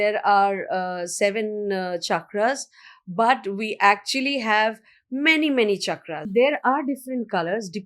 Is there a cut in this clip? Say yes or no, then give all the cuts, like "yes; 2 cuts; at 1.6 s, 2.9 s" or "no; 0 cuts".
yes; 1 cut; at 6.3 s